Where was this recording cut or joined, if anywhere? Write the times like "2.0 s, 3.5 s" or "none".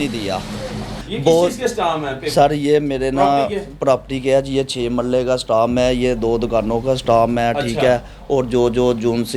1.0 s